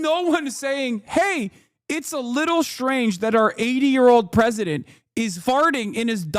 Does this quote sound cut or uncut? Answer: cut